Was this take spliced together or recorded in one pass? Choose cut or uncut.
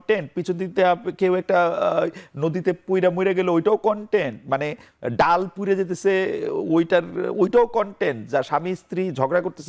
uncut